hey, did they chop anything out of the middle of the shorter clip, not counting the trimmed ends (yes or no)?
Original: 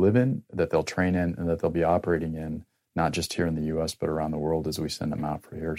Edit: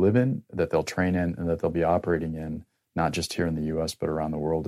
no